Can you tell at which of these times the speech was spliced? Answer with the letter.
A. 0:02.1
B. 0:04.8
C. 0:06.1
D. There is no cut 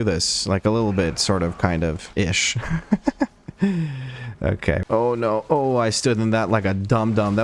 B